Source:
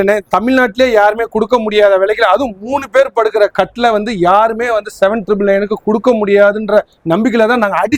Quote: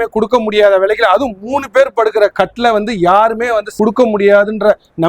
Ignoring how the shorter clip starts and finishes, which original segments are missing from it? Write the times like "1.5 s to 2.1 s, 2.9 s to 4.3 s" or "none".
4.9 s to 5.8 s